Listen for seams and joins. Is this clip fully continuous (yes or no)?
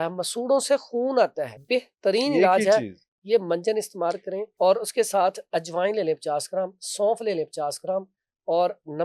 no